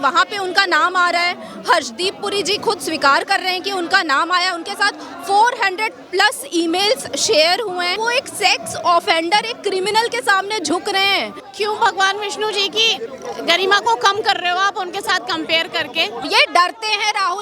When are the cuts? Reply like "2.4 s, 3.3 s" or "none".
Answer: 8.0 s, 11.4 s, 16.2 s